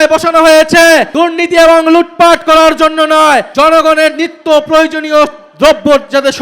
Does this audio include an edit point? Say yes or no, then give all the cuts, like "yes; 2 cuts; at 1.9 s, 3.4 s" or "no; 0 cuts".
yes; 2 cuts; at 1.1 s, 3.5 s